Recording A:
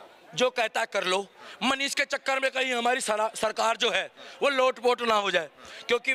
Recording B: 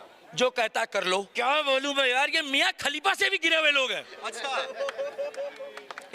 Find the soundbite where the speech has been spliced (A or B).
B